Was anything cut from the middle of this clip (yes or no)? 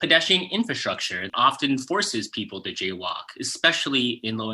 yes